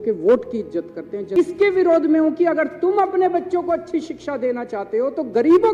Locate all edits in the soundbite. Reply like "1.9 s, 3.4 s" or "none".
1.3 s